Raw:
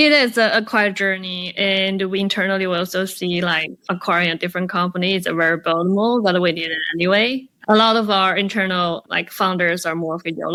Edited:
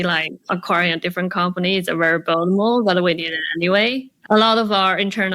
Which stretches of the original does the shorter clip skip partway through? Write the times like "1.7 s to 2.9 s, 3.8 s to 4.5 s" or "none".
none